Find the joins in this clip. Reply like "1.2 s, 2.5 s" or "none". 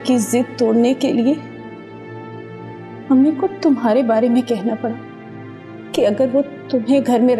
none